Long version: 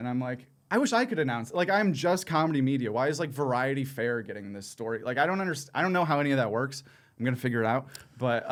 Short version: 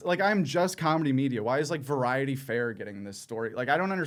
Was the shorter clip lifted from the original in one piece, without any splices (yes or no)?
yes